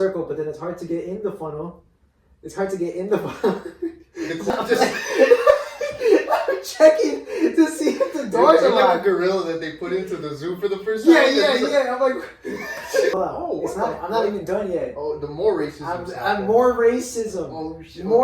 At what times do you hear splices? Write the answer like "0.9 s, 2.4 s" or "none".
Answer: 4.5 s, 13.1 s